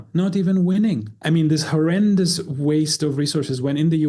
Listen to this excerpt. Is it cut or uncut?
cut